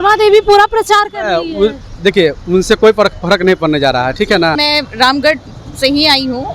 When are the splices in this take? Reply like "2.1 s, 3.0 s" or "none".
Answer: 4.6 s